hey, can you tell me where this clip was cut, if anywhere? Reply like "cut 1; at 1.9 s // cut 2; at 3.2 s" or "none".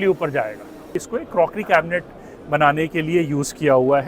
cut 1; at 0.9 s